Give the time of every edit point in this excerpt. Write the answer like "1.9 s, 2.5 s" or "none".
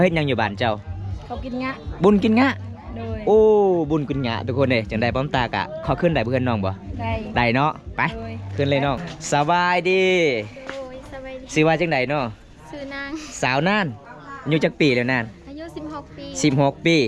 9.1 s